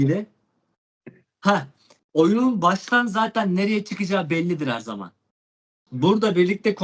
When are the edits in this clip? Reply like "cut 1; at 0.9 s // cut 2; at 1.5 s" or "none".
cut 1; at 5.8 s